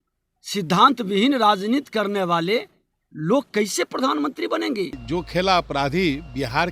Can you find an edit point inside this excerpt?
yes; 1 cut; at 5.0 s

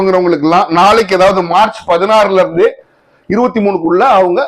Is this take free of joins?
yes; 0 cuts

